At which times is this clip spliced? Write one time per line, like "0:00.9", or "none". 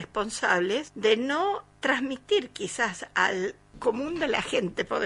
0:00.9
0:01.7
0:03.7